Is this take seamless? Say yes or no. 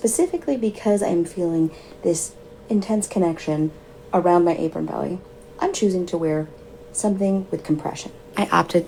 yes